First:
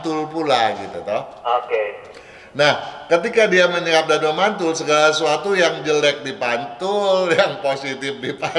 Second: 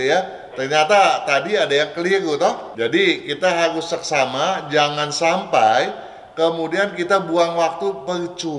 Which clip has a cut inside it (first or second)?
second